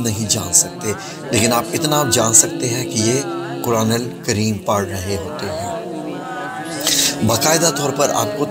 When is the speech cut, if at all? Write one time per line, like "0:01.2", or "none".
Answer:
none